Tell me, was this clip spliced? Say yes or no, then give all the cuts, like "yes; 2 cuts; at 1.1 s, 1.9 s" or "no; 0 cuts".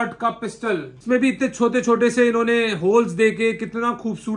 yes; 1 cut; at 0.9 s